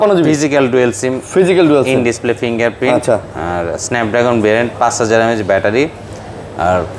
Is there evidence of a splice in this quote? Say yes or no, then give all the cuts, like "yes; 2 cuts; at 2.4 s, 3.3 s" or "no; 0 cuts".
no; 0 cuts